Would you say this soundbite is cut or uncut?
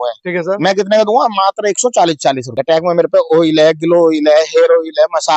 cut